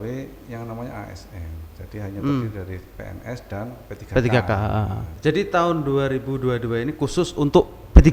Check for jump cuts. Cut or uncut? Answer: cut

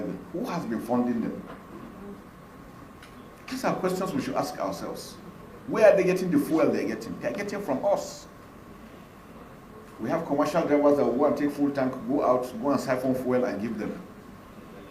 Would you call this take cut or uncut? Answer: uncut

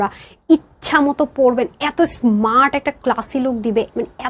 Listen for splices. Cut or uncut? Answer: uncut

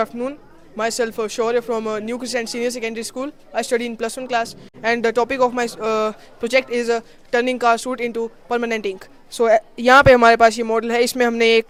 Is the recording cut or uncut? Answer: uncut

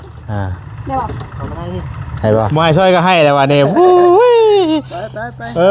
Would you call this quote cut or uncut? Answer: cut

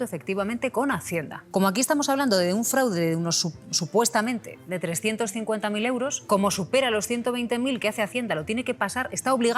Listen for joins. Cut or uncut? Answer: cut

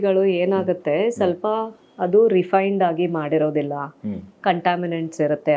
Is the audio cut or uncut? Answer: uncut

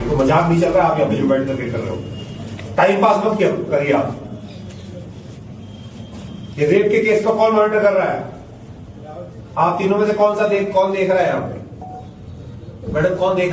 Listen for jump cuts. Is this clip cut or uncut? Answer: uncut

